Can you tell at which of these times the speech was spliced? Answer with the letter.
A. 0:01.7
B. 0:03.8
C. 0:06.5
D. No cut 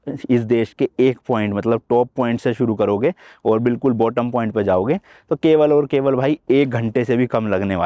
D